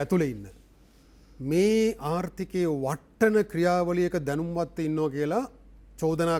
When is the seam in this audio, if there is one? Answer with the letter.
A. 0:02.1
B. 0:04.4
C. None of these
C